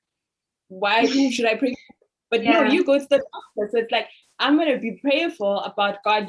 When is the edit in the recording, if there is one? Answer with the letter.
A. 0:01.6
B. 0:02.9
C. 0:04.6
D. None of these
D